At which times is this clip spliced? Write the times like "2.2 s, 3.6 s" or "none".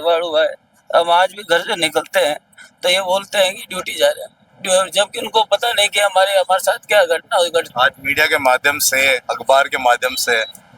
none